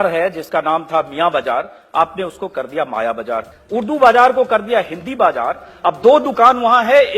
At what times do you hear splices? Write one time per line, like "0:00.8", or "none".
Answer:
0:03.5